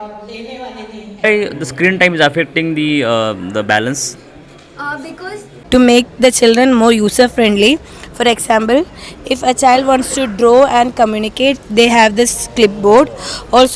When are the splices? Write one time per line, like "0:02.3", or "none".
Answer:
0:01.2
0:05.5